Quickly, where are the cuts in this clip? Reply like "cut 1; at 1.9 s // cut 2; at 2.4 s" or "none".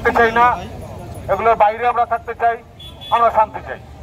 none

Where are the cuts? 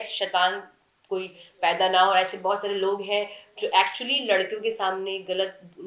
none

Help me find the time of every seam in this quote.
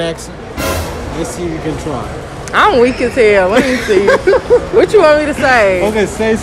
none

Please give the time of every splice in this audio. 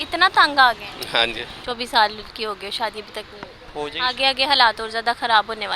cut 1; at 1.4 s

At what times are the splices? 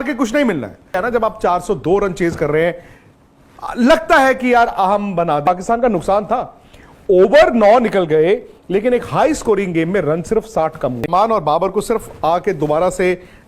cut 1; at 0.9 s // cut 2; at 5.5 s // cut 3; at 11.1 s

